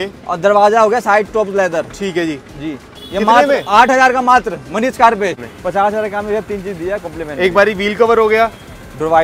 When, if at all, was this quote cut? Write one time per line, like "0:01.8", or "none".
0:05.4